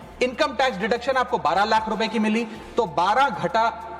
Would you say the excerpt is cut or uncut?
uncut